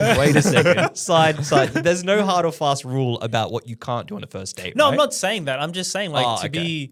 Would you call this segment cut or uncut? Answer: uncut